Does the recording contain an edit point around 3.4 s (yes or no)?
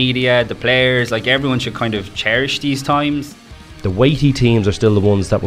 yes